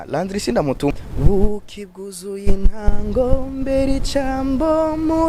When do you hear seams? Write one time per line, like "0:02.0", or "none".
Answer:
0:00.9

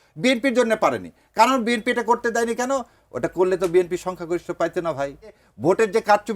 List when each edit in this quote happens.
0:05.5

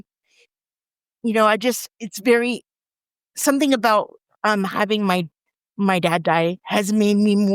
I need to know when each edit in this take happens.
0:02.7

